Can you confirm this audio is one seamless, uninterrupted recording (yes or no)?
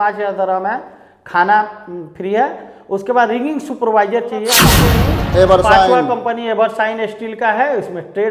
no